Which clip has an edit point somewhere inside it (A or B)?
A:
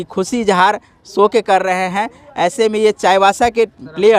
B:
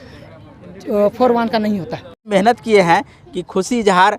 B